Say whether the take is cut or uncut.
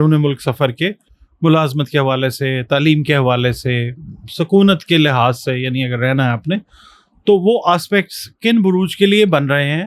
uncut